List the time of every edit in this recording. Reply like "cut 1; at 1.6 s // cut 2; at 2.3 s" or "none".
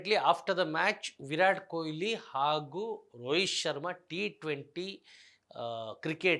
none